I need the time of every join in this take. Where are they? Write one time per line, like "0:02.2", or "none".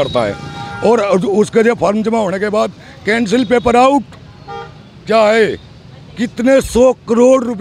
none

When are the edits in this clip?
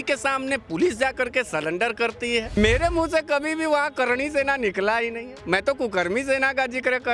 0:02.5

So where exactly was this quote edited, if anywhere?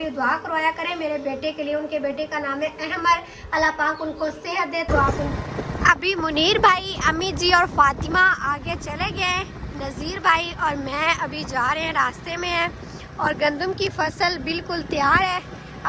0:05.2

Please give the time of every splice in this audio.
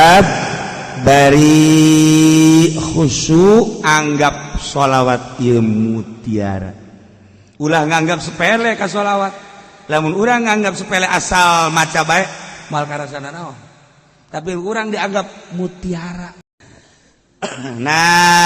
0:16.4

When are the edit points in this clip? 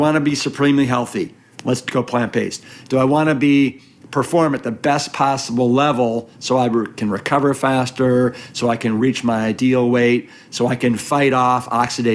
none

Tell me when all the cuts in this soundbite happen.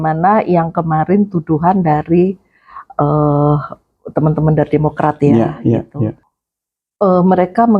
0:06.2

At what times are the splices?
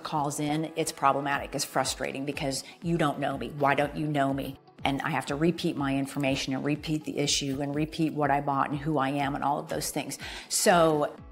none

